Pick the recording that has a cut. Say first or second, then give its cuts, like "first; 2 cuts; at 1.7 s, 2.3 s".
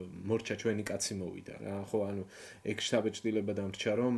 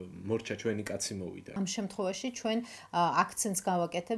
second; 1 cut; at 1.6 s